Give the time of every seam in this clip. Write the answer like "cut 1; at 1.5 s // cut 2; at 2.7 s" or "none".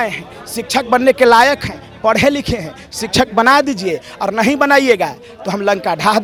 none